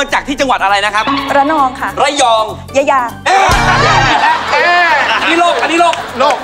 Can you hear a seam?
no; 0 cuts

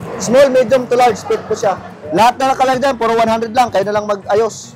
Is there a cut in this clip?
no; 0 cuts

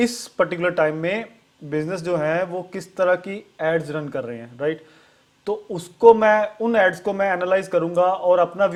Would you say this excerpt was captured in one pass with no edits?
yes; 0 cuts

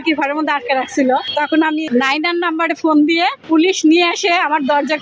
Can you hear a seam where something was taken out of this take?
yes; 2 cuts; at 1.7 s, 3.4 s

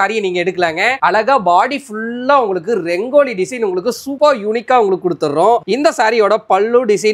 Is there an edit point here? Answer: no; 0 cuts

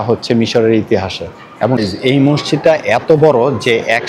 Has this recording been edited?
yes; 1 cut; at 1.8 s

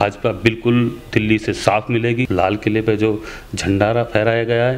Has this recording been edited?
yes; 1 cut; at 2.2 s

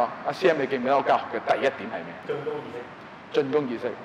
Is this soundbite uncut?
no; 1 cut; at 2.2 s

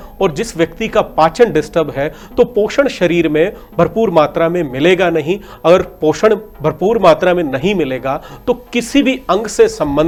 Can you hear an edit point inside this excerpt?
no; 0 cuts

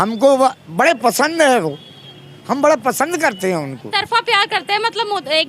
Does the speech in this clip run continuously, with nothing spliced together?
no; 1 cut; at 3.8 s

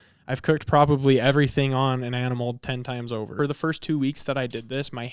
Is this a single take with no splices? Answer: no; 1 cut; at 3.3 s

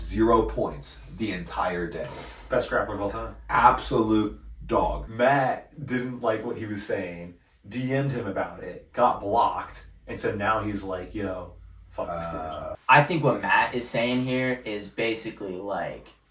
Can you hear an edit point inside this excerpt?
yes; 2 cuts; at 5.0 s, 12.7 s

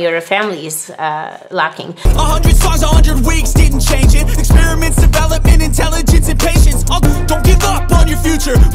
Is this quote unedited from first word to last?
no; 1 cut; at 1.9 s

